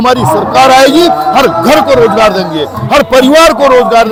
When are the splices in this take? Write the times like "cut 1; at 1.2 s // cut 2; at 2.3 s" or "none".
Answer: none